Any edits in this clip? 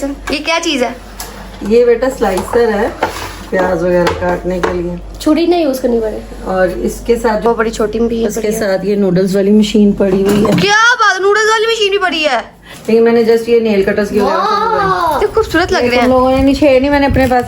yes; 2 cuts; at 7.5 s, 12.7 s

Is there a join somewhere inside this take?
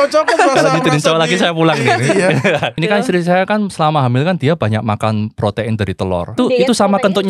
yes; 2 cuts; at 2.7 s, 6.4 s

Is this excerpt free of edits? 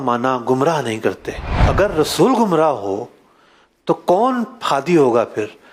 yes; 0 cuts

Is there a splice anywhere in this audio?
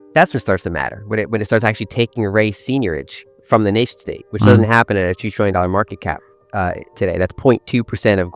no; 0 cuts

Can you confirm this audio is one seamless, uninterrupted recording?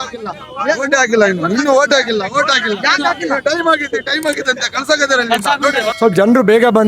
no; 1 cut; at 5.9 s

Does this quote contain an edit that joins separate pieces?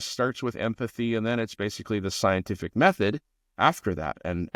no; 0 cuts

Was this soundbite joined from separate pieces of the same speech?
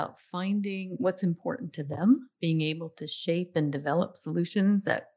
yes; 2 cuts; at 0.9 s, 2.3 s

